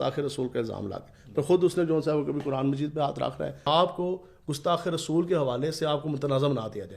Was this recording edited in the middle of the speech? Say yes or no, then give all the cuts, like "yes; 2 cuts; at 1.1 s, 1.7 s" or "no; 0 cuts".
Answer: yes; 1 cut; at 3.6 s